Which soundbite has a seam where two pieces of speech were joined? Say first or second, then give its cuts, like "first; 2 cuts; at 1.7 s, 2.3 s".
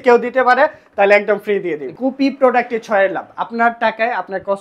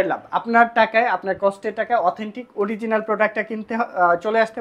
first; 1 cut; at 1.9 s